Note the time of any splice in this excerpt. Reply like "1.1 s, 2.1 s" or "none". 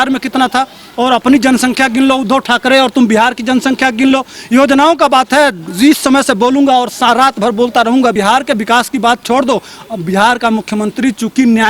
8.1 s